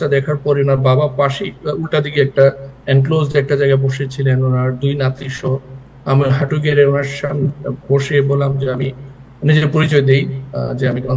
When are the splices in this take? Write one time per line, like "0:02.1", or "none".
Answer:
none